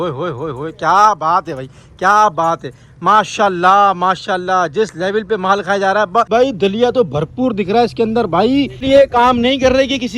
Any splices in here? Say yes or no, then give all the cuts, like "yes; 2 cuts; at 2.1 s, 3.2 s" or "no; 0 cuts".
yes; 2 cuts; at 6.3 s, 8.8 s